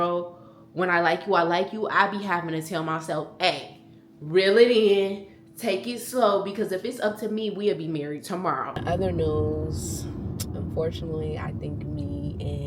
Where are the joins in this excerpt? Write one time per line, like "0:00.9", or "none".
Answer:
0:08.7